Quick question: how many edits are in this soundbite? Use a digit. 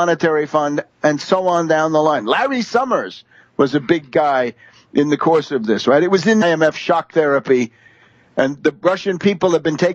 0